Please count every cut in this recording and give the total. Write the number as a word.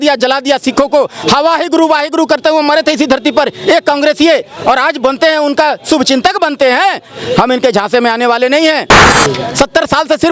one